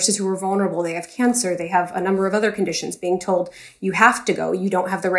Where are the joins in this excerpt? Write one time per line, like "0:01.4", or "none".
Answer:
none